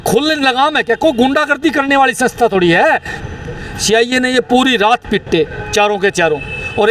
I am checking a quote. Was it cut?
yes; 1 cut; at 3.1 s

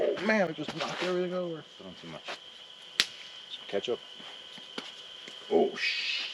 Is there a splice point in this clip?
yes; 1 cut; at 2.1 s

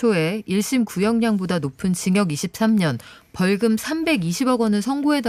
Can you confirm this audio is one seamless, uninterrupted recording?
yes; 0 cuts

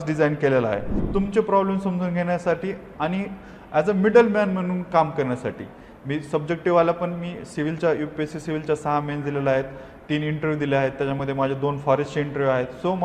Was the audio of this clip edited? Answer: yes; 1 cut; at 1.0 s

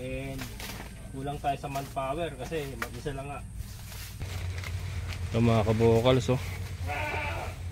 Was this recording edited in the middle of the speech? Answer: yes; 1 cut; at 4.2 s

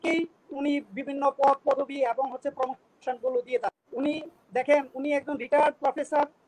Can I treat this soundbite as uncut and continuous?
no; 1 cut; at 3.8 s

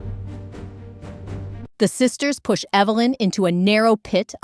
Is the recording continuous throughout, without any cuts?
no; 1 cut; at 1.7 s

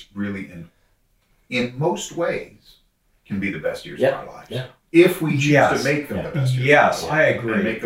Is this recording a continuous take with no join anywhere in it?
yes; 0 cuts

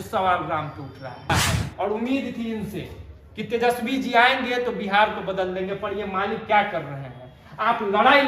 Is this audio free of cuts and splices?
no; 1 cut; at 1.3 s

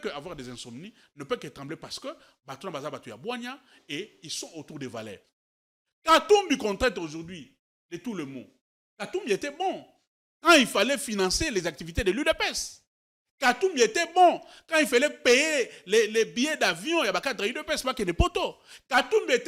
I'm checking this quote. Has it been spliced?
yes; 1 cut; at 5.3 s

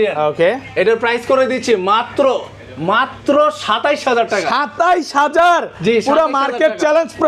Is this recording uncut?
yes; 0 cuts

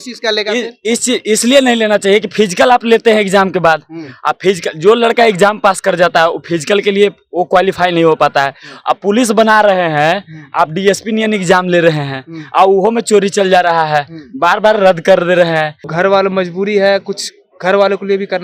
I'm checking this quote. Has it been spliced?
yes; 1 cut; at 15.9 s

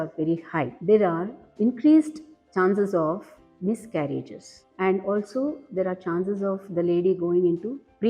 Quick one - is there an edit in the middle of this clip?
yes; 1 cut; at 4.4 s

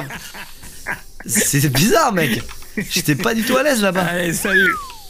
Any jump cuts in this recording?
yes; 1 cut; at 2.6 s

